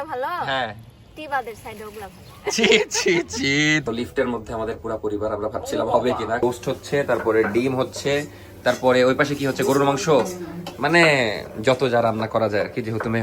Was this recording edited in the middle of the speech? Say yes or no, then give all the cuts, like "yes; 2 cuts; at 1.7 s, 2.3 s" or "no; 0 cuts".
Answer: yes; 2 cuts; at 3.8 s, 6.4 s